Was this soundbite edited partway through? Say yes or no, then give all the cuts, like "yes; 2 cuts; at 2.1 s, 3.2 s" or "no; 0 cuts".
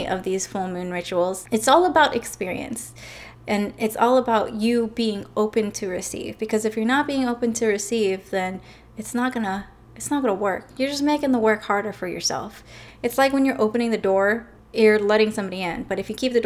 yes; 2 cuts; at 1.4 s, 14.6 s